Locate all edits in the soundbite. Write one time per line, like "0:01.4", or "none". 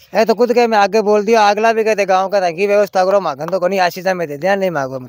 none